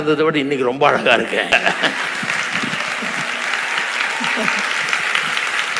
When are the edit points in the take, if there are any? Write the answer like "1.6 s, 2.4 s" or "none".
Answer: 1.5 s